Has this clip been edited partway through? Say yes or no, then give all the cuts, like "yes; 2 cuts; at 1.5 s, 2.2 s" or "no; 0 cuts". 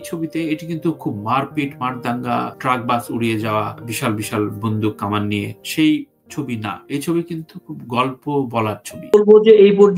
yes; 1 cut; at 8.9 s